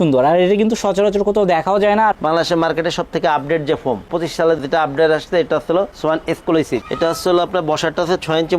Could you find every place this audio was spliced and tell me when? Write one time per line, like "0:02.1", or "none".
0:02.1
0:06.9